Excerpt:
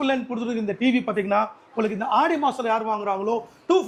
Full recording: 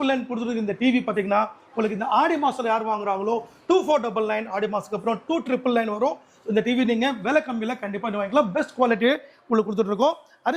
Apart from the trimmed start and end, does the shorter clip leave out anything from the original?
no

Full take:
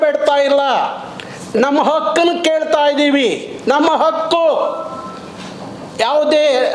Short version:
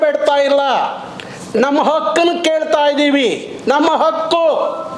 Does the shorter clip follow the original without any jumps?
yes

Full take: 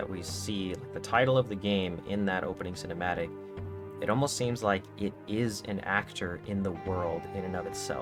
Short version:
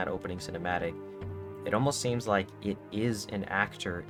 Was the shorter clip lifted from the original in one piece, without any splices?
yes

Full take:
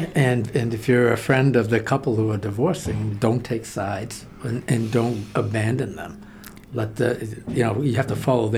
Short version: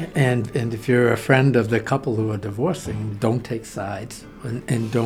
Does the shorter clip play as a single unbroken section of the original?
yes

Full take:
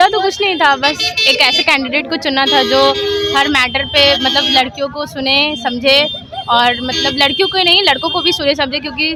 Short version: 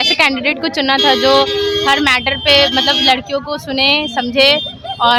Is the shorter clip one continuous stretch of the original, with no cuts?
yes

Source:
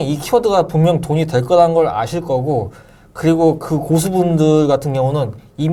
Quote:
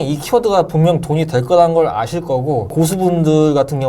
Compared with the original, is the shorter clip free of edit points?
no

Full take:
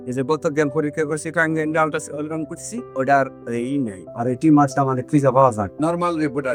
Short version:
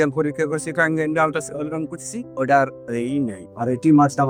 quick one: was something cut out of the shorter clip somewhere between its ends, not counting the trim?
no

